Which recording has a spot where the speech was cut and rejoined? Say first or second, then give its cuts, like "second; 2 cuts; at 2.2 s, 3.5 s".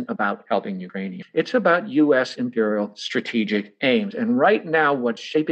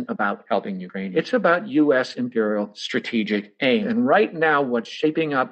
second; 2 cuts; at 1.1 s, 3.8 s